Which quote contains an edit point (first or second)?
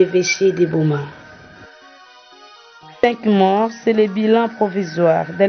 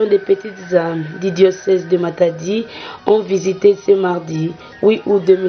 first